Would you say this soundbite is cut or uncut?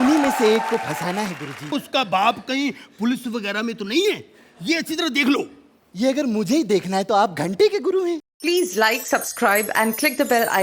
cut